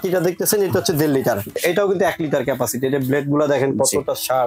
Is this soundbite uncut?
no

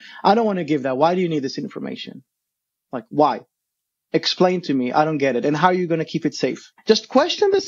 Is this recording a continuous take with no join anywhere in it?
no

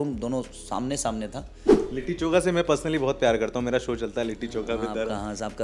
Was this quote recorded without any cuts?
no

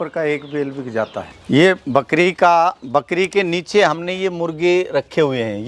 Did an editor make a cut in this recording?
yes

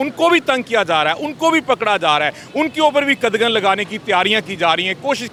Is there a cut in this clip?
no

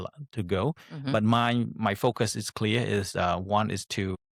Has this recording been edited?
no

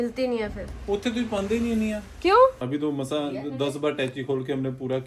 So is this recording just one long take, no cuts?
no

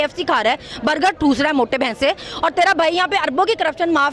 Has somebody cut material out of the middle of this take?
no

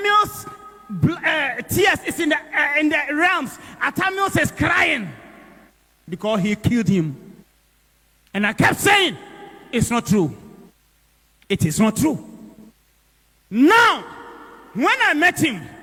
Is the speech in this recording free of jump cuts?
yes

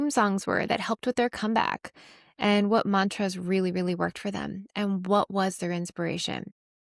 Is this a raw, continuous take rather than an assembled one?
yes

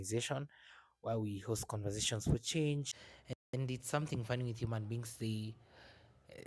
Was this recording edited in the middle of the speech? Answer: yes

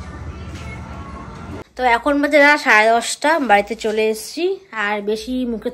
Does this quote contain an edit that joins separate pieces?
no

